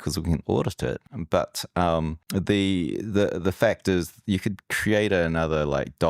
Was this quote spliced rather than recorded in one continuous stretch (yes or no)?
yes